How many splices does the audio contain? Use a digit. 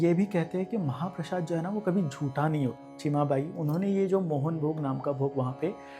1